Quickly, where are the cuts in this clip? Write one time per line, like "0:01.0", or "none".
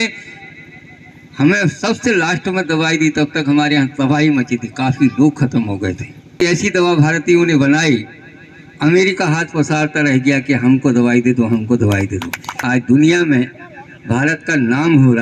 0:06.4
0:12.6